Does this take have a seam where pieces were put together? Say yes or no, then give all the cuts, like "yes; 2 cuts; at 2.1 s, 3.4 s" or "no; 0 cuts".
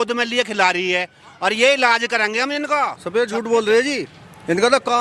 yes; 1 cut; at 3.0 s